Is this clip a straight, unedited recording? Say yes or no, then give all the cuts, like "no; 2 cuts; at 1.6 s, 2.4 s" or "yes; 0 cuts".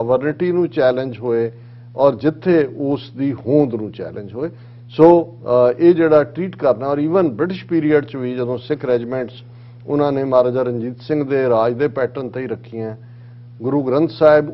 yes; 0 cuts